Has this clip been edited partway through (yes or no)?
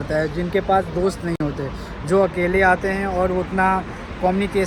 no